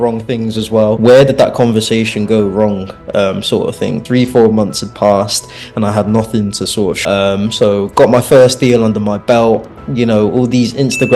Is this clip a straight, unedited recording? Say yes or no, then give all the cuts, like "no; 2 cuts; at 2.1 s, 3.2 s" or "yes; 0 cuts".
no; 4 cuts; at 1.0 s, 4.0 s, 7.0 s, 9.8 s